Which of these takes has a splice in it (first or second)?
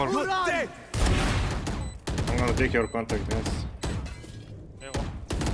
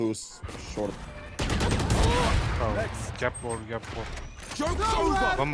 first